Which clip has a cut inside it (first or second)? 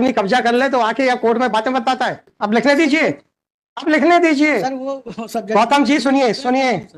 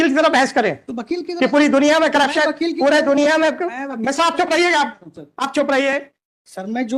first